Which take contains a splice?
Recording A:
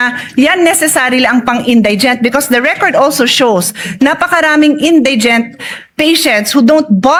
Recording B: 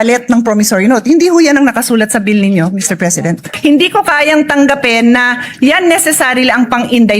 B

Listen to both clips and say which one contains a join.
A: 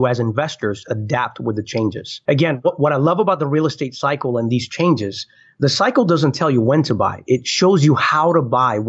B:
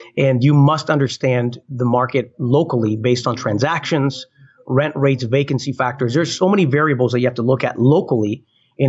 A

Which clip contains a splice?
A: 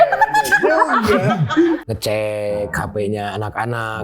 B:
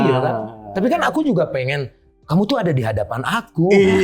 A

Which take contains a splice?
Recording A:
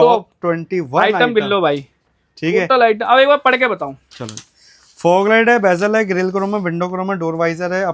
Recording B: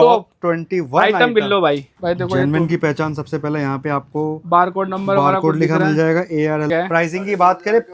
B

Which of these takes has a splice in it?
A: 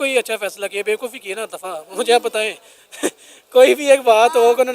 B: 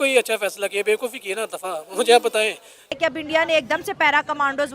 B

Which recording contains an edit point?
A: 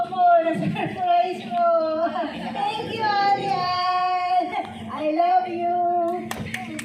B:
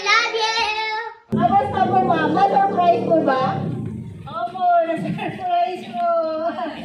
B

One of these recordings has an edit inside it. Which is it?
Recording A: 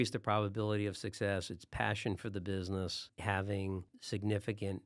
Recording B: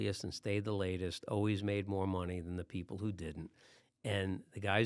A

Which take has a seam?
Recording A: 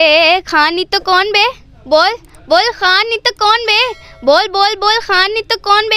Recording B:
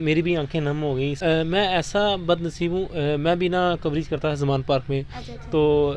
B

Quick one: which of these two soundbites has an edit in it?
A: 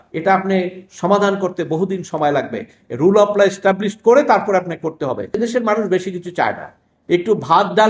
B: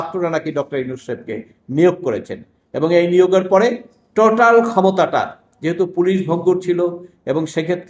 A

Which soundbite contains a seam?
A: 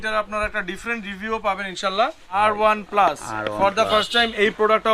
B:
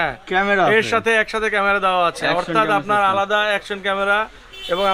A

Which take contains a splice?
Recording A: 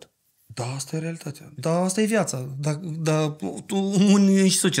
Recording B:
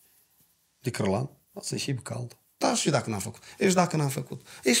B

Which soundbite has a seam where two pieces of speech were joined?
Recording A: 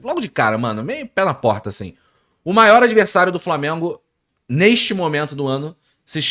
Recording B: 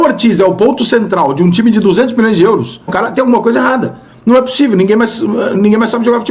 B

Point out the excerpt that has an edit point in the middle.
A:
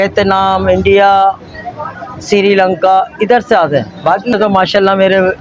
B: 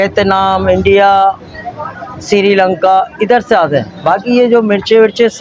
A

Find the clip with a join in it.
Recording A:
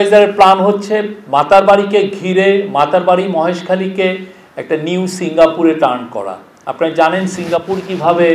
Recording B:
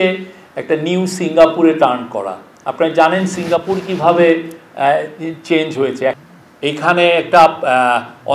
B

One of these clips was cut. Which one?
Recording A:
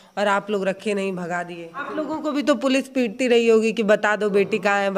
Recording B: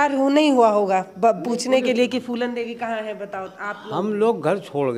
A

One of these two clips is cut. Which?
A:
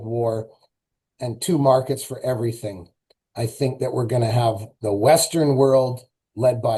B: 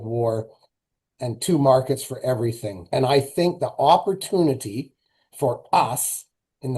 B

